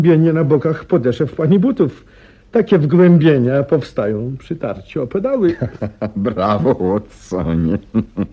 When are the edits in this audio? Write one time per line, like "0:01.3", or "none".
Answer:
0:03.9